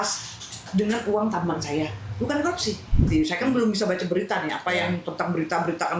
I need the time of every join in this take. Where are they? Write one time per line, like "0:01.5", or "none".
0:03.0